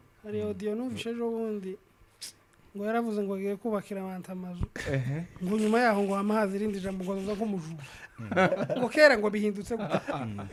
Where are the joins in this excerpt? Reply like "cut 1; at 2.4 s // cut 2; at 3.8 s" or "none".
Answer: none